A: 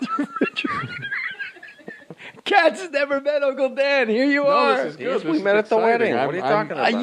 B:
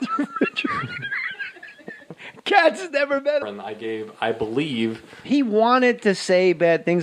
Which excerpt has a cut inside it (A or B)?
A